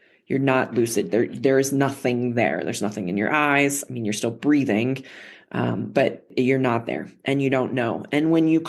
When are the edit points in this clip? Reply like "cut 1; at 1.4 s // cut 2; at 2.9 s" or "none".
cut 1; at 6.3 s